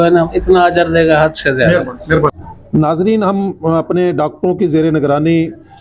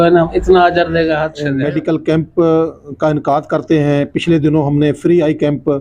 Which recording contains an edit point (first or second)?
second